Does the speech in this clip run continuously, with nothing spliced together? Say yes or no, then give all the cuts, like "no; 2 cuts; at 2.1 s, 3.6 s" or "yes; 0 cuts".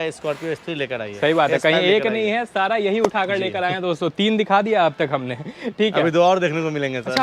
yes; 0 cuts